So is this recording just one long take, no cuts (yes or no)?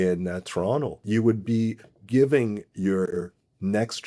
no